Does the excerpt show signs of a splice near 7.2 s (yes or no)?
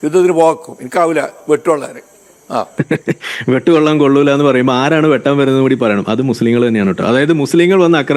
no